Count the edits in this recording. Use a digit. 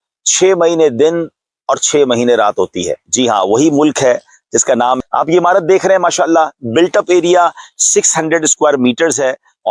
1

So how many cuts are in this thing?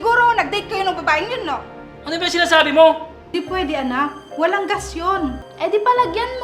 2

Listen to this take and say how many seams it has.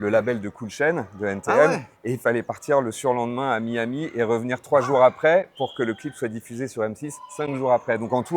0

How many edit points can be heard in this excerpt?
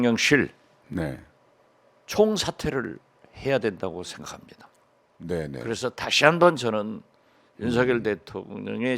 1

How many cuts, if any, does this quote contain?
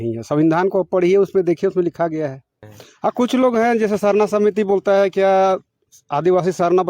0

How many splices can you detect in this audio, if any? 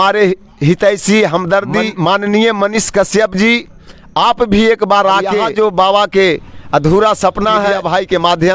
3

